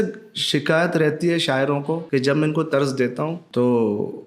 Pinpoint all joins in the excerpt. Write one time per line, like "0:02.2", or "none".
0:02.0
0:03.4

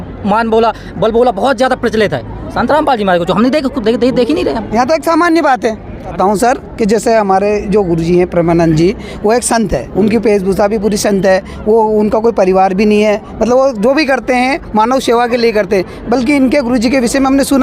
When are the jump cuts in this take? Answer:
0:06.1

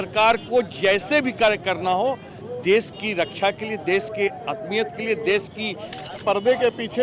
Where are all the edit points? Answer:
0:06.1

